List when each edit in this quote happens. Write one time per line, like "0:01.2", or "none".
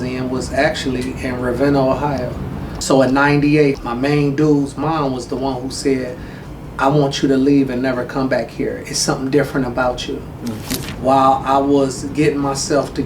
0:02.8
0:03.8
0:10.7